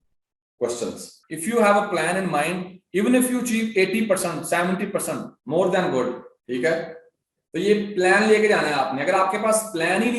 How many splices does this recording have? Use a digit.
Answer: 1